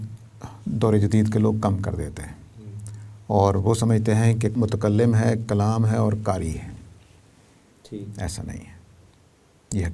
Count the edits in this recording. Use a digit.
1